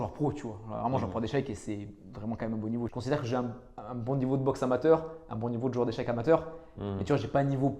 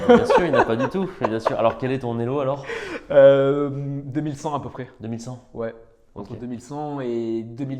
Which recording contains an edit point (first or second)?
first